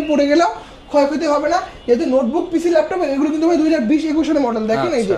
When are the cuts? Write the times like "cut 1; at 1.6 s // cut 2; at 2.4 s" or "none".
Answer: none

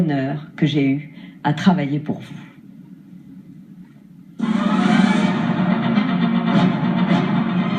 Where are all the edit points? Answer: cut 1; at 3.7 s

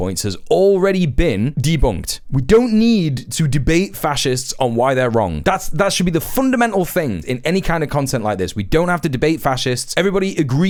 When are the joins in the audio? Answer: none

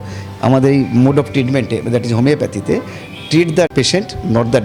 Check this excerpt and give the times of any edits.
cut 1; at 3.7 s

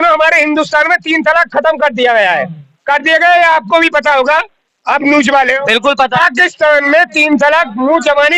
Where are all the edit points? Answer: none

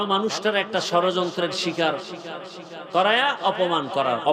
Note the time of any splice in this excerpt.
none

